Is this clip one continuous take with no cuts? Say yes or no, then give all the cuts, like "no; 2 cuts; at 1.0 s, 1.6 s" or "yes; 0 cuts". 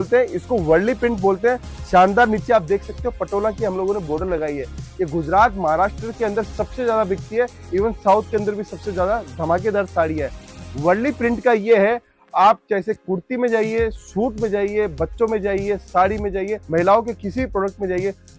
yes; 0 cuts